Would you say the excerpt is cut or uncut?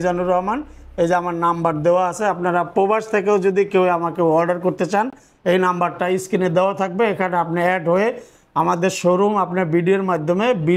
uncut